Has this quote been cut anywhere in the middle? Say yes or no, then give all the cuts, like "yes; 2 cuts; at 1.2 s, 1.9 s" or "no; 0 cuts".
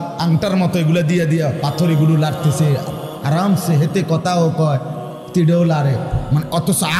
no; 0 cuts